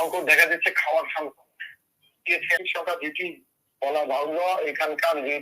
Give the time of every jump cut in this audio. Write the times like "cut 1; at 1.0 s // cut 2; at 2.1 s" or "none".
cut 1; at 2.6 s